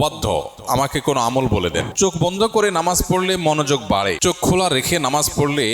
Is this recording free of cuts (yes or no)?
no